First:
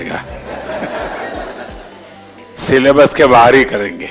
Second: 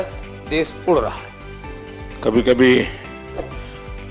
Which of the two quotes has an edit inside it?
second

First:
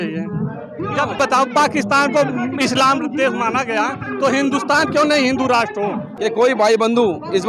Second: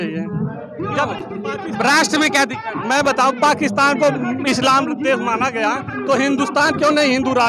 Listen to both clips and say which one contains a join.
first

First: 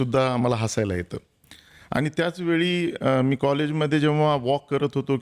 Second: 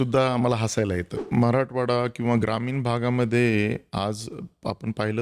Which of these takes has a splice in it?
second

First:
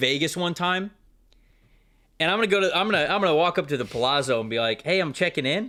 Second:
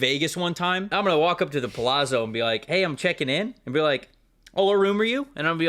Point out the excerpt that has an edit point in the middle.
second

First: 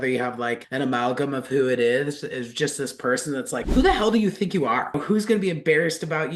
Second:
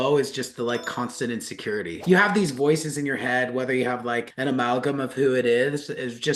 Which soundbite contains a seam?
first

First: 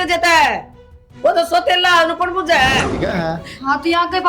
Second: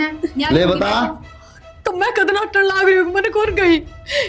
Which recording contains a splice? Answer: first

